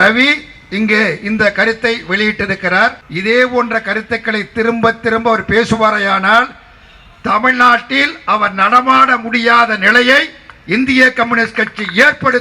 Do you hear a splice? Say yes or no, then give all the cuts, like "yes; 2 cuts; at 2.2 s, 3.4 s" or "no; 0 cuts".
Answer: yes; 1 cut; at 3.1 s